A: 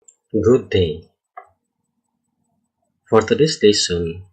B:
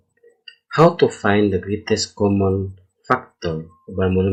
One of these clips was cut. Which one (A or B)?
A